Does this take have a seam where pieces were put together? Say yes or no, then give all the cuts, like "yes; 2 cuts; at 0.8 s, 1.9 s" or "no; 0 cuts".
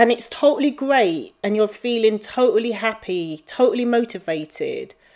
no; 0 cuts